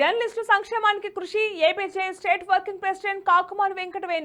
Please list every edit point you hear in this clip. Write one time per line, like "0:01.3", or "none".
none

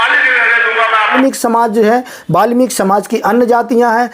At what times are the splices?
0:01.1

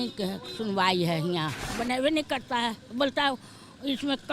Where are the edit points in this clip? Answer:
0:01.6

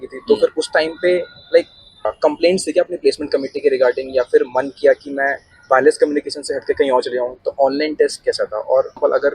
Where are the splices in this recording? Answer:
0:02.0
0:07.3

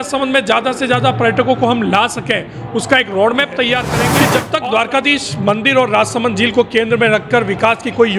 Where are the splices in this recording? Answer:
0:04.1

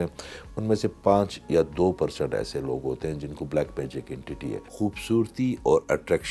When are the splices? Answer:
0:04.7

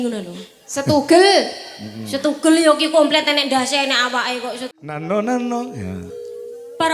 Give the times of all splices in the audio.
0:04.7

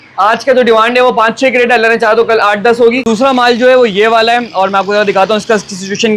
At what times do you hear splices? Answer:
0:03.0

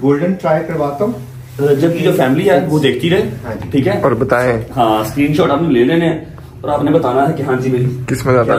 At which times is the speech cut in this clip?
none

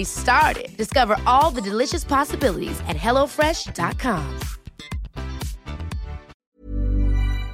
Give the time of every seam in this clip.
0:06.3

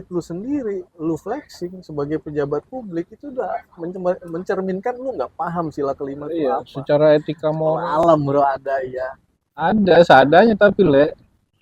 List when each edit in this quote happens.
0:07.9

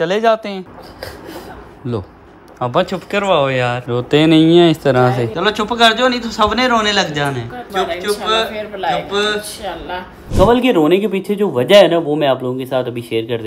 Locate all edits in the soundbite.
0:05.3
0:07.6
0:10.2

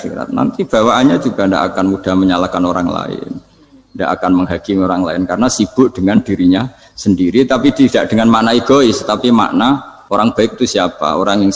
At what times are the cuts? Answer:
0:09.9

